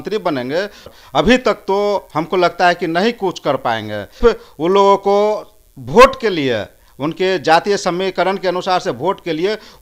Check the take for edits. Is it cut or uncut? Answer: cut